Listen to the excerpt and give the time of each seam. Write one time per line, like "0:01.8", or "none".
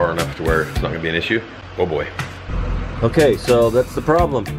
0:01.6
0:02.6